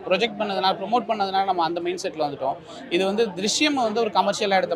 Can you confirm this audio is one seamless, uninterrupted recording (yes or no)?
yes